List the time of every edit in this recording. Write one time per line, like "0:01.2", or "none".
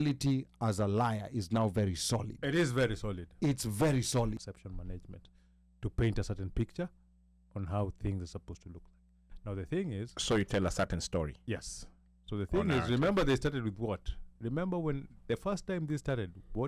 0:04.4